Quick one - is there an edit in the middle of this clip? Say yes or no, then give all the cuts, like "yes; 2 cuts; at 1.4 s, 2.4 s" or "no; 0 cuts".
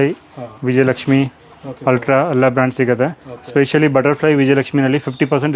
no; 0 cuts